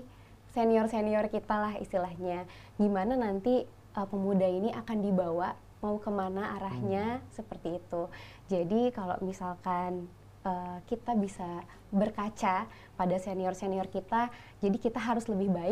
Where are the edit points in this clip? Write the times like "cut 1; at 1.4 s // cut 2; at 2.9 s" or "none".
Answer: none

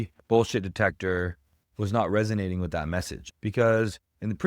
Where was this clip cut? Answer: cut 1; at 3.2 s

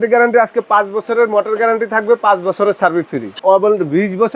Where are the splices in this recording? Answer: cut 1; at 3.4 s

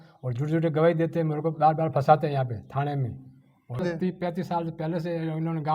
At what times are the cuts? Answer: cut 1; at 3.8 s

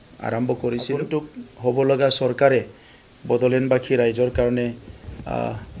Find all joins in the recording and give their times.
cut 1; at 1.4 s

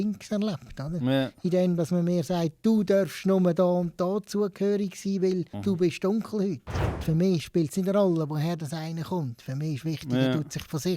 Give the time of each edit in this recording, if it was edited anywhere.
cut 1; at 7.0 s

